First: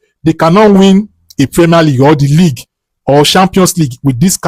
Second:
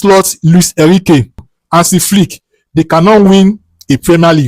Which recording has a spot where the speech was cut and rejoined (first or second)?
second